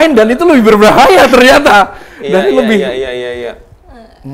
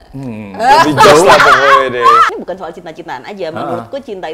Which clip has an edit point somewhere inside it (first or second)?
second